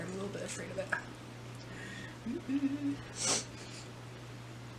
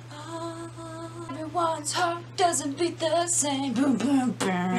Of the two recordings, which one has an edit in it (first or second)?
second